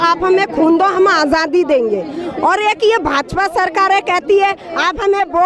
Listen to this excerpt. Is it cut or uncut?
uncut